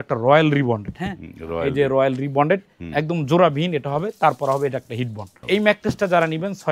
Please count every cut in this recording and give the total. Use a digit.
1